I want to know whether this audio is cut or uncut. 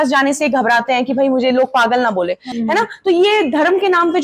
cut